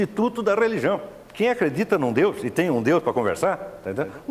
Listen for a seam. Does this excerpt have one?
yes; 1 cut; at 1.2 s

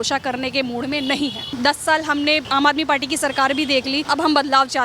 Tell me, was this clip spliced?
yes; 3 cuts; at 1.5 s, 2.4 s, 4.0 s

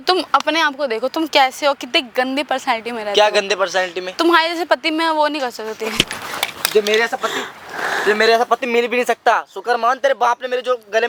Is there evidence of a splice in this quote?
no; 0 cuts

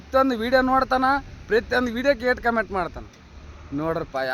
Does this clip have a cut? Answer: no; 0 cuts

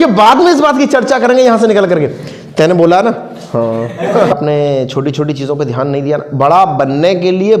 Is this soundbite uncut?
no; 1 cut; at 4.3 s

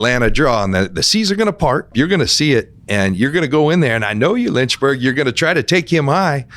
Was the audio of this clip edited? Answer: yes; 1 cut; at 1.9 s

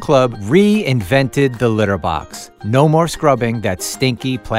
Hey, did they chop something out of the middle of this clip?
no; 0 cuts

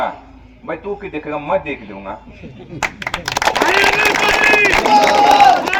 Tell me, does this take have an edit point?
no; 0 cuts

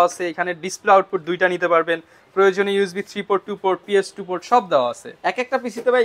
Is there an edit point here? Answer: no; 0 cuts

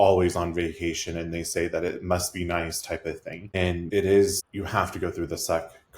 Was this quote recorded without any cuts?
no; 2 cuts; at 3.8 s, 4.4 s

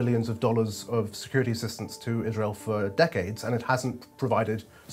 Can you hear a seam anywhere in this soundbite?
no; 0 cuts

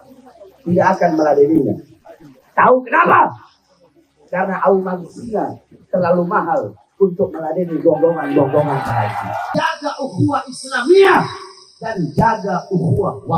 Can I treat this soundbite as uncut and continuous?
no; 1 cut; at 9.5 s

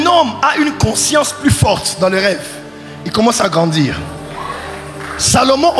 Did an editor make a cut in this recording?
no; 0 cuts

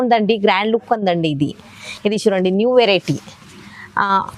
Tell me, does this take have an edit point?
no; 0 cuts

